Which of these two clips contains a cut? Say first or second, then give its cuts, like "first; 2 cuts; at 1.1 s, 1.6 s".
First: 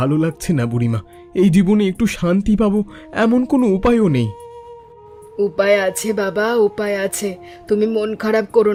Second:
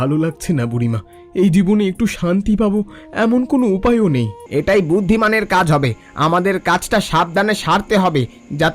second; 1 cut; at 4.4 s